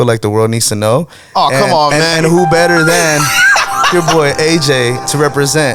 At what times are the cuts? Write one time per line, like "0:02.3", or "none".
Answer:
none